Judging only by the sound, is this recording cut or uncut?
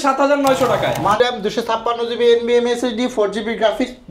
cut